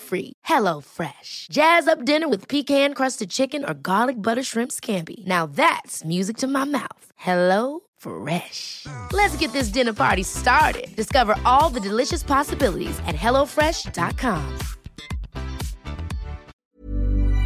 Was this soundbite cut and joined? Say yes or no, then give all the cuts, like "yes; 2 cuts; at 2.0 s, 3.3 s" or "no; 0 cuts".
yes; 1 cut; at 16.5 s